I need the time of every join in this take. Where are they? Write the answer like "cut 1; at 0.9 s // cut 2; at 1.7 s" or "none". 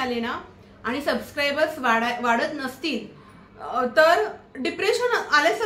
none